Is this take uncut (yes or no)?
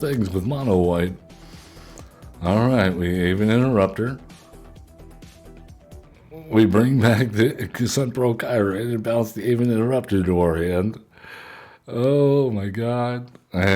no